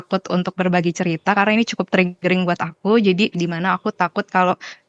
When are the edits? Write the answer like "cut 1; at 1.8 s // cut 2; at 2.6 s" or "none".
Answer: none